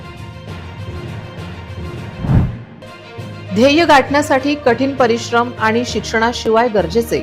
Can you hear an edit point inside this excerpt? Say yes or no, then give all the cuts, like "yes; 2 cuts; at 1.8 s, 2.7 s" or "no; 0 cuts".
yes; 1 cut; at 2.1 s